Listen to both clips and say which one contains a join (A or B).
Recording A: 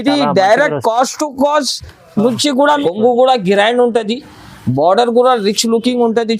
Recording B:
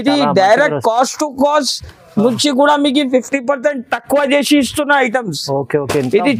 A